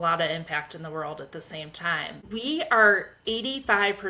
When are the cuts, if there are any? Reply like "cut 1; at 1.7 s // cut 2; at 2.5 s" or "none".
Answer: cut 1; at 2.2 s